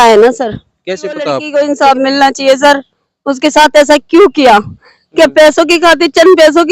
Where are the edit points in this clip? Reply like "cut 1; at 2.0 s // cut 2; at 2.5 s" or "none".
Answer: cut 1; at 1.4 s

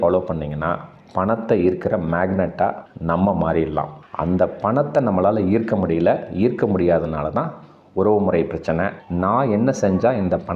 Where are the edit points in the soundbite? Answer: cut 1; at 4.1 s // cut 2; at 9.0 s

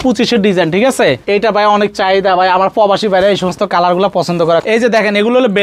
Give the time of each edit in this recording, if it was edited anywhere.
cut 1; at 1.2 s // cut 2; at 4.6 s

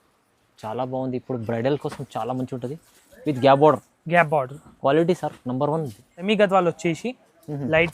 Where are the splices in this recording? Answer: cut 1; at 6.1 s

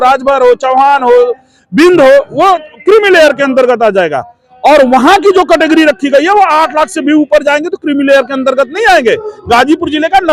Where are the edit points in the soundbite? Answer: none

